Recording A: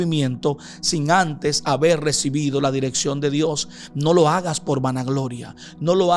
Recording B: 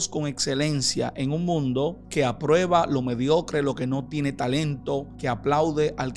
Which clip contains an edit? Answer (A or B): B